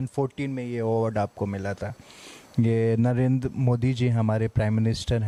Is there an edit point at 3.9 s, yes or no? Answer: no